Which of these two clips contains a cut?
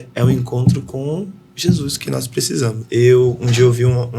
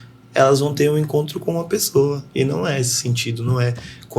first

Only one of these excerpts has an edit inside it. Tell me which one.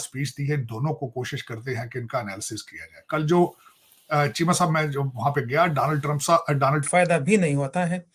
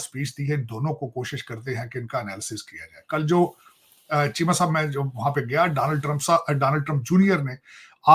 first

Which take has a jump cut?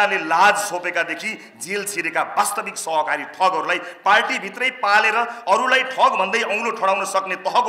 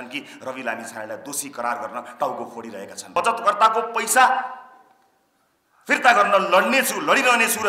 second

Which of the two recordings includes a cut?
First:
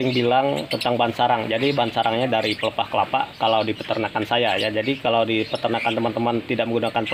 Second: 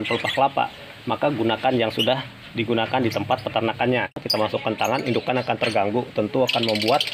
second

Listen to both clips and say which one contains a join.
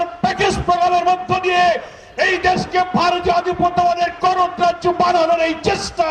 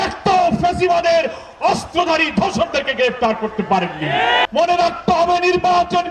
second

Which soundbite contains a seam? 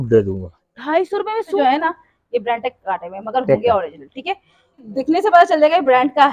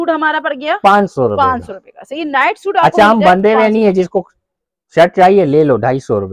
first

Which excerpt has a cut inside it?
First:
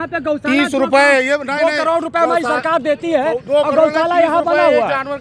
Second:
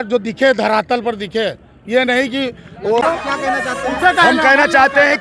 second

